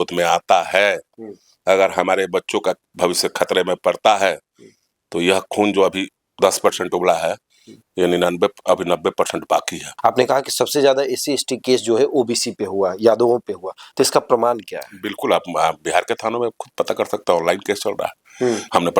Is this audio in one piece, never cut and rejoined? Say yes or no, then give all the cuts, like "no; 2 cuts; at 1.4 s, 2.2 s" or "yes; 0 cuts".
no; 1 cut; at 9.9 s